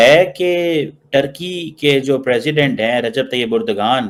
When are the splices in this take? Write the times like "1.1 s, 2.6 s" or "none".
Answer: none